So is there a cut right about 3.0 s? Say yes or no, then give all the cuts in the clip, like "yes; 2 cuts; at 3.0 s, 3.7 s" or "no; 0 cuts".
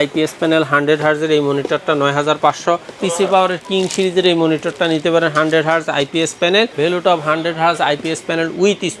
yes; 2 cuts; at 3.0 s, 6.7 s